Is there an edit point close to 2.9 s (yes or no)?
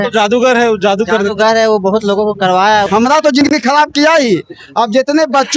yes